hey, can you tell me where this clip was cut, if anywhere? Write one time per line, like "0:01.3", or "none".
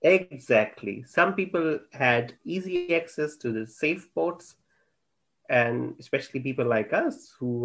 none